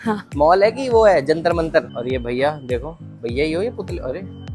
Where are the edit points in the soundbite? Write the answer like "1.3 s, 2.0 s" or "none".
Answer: 1.9 s